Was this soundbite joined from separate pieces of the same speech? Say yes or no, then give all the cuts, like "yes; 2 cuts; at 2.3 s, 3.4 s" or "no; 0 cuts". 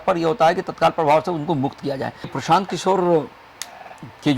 yes; 1 cut; at 2.3 s